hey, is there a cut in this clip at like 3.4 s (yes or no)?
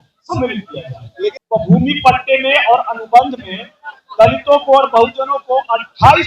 no